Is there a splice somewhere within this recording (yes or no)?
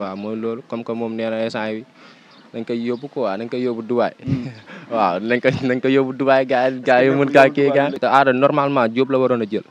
yes